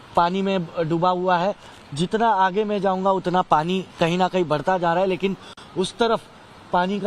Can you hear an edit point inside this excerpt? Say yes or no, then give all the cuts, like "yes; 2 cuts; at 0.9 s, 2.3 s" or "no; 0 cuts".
no; 0 cuts